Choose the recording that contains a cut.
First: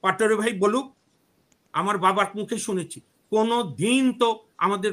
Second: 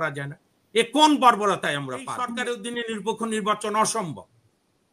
second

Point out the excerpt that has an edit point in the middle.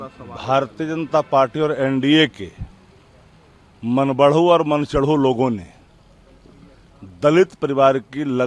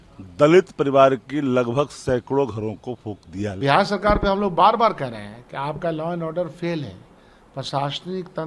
second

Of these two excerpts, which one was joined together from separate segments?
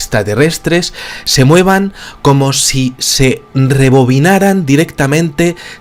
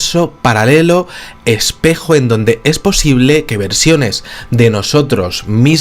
second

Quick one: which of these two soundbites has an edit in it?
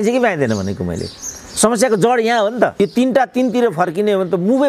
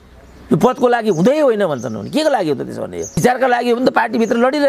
first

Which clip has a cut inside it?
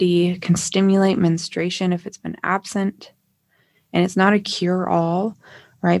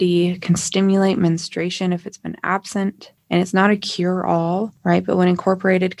second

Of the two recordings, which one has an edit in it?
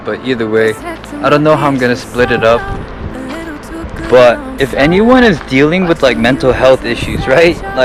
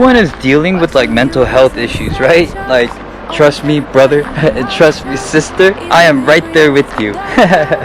second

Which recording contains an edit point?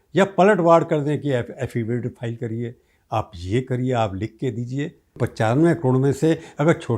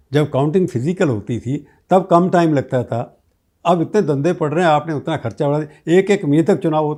first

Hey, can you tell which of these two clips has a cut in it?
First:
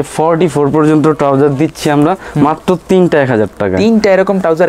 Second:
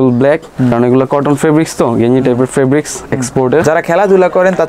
second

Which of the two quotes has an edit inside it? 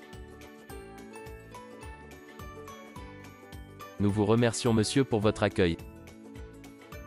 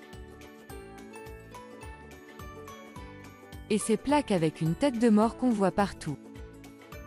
first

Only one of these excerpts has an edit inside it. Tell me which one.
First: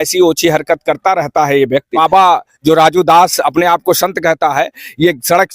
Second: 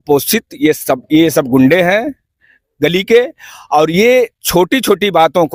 first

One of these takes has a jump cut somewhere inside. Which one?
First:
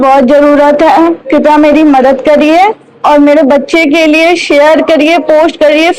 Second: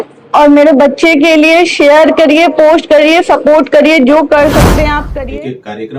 second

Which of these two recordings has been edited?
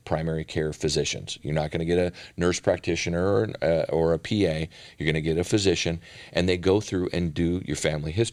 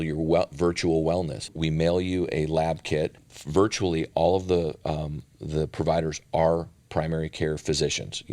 second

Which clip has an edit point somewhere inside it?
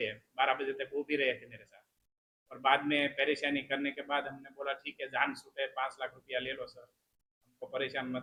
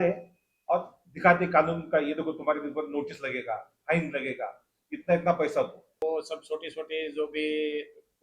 second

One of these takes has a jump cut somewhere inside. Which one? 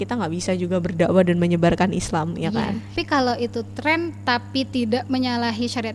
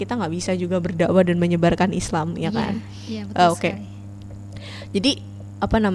first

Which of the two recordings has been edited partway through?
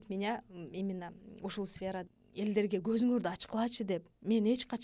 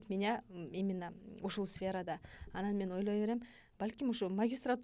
first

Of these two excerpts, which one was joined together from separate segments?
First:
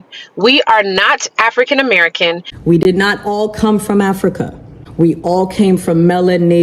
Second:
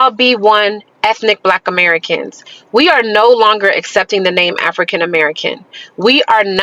first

